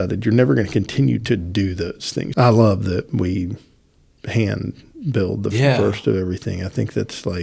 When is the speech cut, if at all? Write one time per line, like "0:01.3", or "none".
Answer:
0:02.3